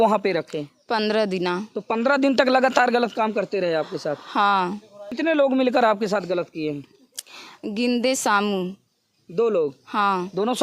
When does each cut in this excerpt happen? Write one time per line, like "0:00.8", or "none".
0:05.0